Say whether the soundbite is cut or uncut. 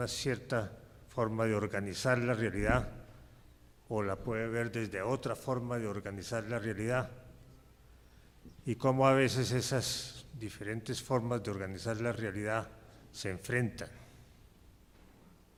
uncut